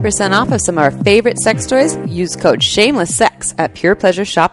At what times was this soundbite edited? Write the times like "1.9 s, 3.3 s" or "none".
none